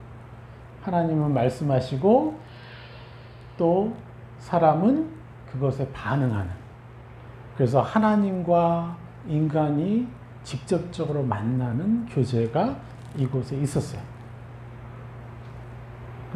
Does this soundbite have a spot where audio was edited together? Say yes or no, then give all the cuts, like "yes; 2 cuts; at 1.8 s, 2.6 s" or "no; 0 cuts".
no; 0 cuts